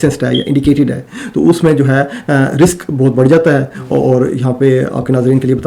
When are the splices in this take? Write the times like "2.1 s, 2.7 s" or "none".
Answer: none